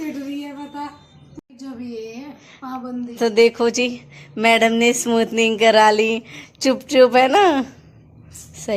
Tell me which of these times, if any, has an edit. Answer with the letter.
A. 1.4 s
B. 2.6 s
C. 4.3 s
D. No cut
A